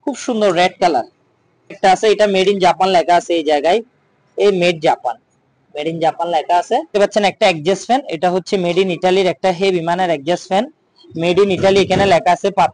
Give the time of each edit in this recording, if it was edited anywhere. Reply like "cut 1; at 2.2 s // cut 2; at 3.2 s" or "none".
cut 1; at 1.8 s // cut 2; at 6.9 s